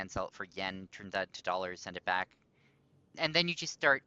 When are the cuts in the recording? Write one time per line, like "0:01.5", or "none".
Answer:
0:03.1

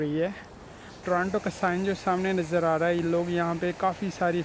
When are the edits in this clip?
0:01.0

